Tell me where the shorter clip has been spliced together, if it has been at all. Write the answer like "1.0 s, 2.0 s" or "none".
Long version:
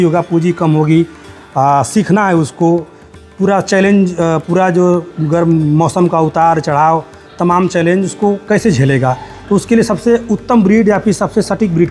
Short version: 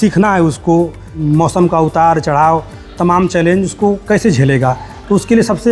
1.2 s